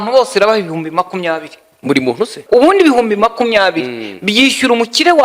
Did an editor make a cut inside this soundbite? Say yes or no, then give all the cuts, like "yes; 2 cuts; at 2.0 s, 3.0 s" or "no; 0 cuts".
yes; 1 cut; at 2.4 s